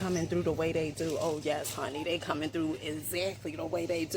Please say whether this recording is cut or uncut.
uncut